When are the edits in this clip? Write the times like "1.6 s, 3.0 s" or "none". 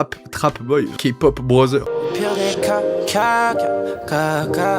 0.9 s, 1.9 s